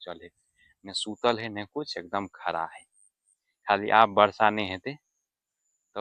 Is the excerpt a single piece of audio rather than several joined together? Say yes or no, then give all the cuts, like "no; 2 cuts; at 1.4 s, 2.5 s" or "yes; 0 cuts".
yes; 0 cuts